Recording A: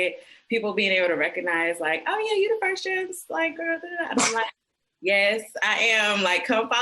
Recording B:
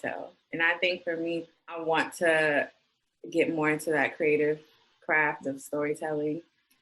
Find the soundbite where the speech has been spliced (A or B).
B